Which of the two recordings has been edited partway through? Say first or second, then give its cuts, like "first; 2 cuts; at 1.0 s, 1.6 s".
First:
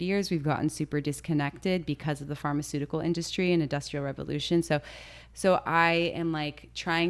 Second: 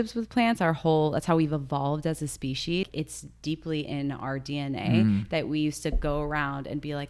second; 1 cut; at 2.9 s